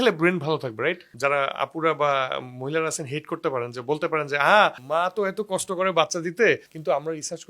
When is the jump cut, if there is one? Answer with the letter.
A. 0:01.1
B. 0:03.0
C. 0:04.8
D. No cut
A